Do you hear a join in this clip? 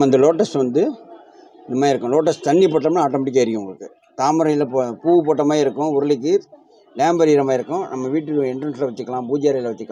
no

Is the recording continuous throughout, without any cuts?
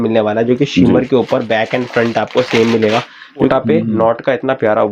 no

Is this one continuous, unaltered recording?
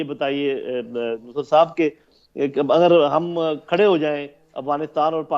yes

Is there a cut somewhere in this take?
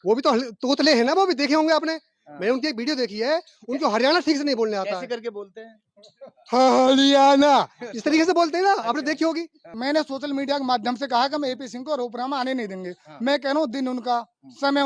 yes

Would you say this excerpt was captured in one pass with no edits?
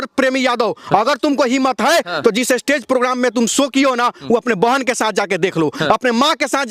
yes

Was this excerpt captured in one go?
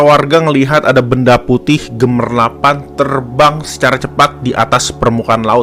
yes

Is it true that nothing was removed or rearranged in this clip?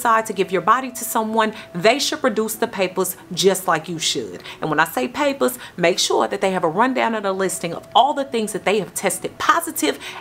yes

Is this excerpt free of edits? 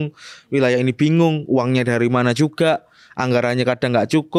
yes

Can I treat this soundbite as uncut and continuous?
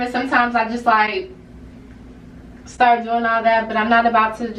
yes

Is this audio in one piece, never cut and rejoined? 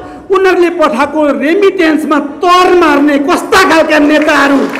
yes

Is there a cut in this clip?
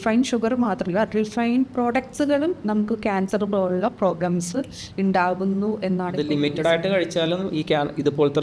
no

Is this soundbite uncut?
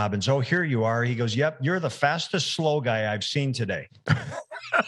yes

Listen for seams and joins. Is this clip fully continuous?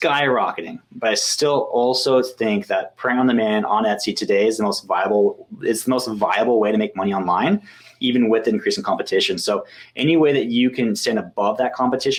yes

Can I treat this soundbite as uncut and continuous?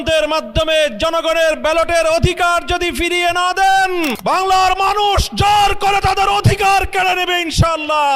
no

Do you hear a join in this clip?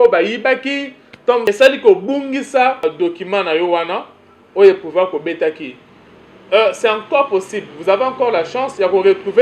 yes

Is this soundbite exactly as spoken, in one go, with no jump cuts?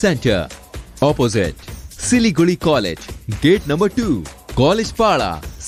yes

